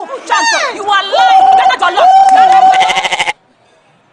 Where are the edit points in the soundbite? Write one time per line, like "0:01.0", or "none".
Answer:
0:01.4

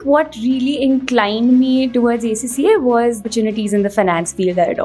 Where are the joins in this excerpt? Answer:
0:03.2

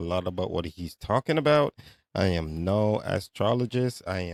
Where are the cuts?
none

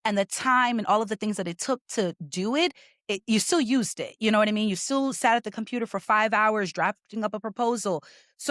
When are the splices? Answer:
none

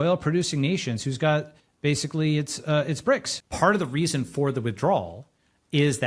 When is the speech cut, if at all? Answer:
0:01.6
0:03.3

